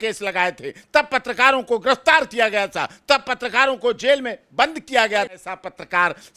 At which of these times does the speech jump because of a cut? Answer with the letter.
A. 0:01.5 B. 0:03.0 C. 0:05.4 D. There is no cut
C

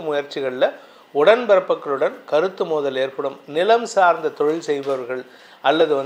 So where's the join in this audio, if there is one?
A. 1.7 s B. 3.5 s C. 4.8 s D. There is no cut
D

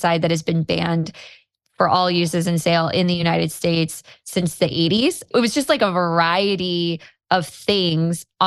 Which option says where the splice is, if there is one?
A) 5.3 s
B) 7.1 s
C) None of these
A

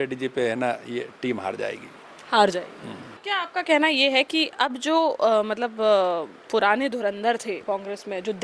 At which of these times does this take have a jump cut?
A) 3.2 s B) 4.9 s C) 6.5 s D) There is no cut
A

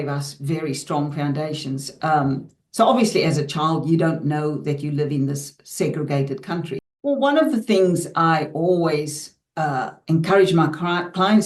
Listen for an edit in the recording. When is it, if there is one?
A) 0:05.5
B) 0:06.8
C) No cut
B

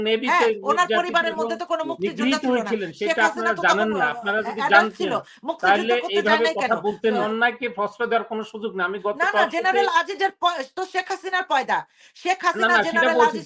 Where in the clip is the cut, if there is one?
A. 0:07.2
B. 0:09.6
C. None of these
A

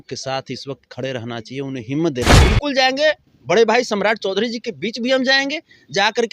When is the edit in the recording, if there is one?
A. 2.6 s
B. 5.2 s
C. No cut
A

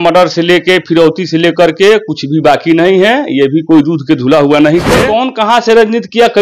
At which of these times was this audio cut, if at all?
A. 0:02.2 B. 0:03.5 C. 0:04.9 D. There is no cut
C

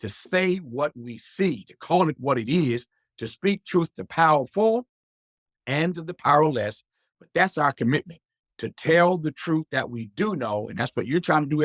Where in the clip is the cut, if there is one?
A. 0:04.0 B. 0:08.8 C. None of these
C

